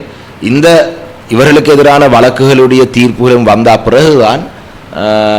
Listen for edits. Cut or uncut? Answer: uncut